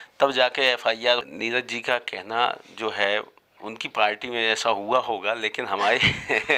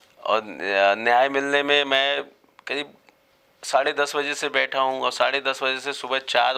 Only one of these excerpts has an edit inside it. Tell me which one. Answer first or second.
first